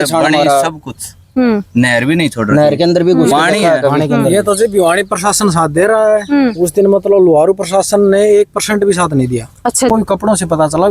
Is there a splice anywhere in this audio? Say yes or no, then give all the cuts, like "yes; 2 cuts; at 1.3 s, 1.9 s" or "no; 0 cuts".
yes; 1 cut; at 9.9 s